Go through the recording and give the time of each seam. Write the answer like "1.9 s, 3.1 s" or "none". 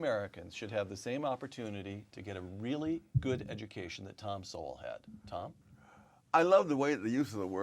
5.6 s